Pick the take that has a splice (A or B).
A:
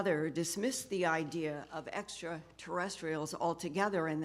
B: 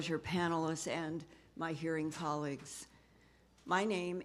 A